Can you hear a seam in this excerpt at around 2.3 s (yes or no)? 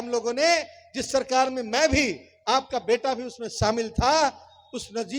no